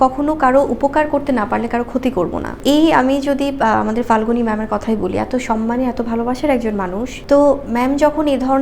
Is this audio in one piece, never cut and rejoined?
no; 2 cuts; at 2.6 s, 7.1 s

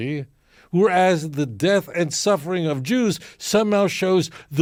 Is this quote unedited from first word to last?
yes; 0 cuts

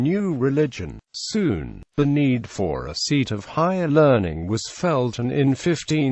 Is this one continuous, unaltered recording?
yes; 0 cuts

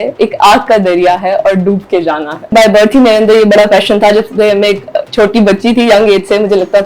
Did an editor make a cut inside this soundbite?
yes; 1 cut; at 2.5 s

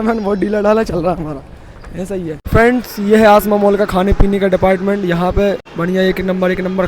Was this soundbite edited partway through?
yes; 2 cuts; at 2.4 s, 5.7 s

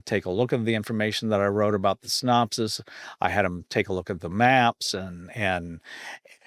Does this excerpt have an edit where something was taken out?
no; 0 cuts

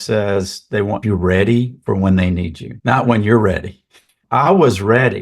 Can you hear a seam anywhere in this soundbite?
yes; 1 cut; at 1.0 s

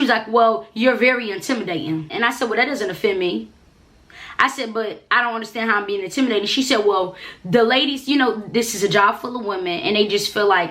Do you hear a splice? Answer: yes; 1 cut; at 2.1 s

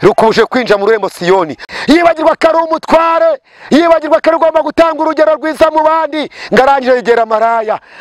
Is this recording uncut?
no; 1 cut; at 1.6 s

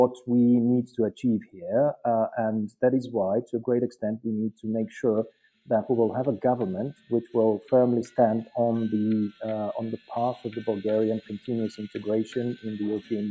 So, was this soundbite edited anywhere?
no; 0 cuts

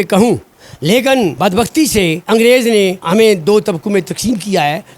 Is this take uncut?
no; 3 cuts; at 1.3 s, 2.2 s, 3.0 s

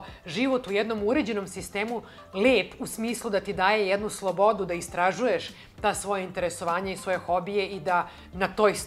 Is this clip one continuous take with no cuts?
yes; 0 cuts

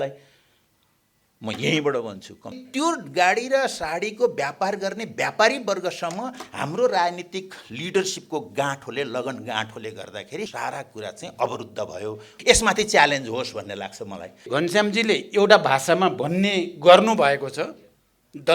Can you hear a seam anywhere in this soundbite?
yes; 4 cuts; at 2.6 s, 10.5 s, 12.4 s, 14.5 s

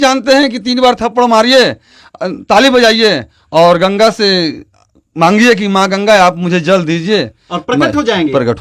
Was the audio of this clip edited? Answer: no; 0 cuts

